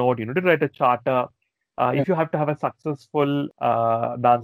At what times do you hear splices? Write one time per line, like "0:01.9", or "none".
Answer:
0:03.5